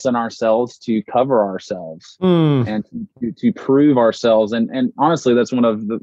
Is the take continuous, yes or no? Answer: yes